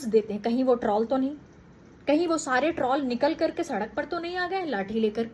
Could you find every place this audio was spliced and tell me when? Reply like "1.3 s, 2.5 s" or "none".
none